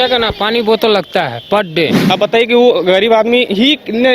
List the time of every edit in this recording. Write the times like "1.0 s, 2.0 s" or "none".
2.0 s